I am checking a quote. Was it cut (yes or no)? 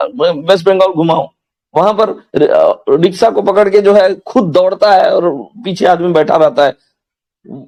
no